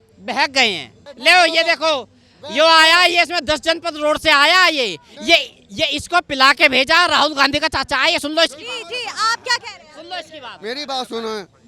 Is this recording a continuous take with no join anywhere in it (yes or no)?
yes